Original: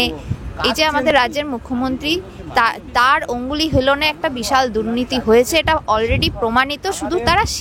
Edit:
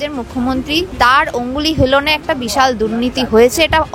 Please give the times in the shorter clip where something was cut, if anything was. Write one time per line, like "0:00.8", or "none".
0:00.9